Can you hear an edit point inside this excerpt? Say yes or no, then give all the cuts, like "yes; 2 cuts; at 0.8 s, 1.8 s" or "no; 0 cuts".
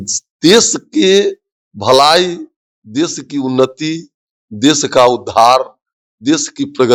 no; 0 cuts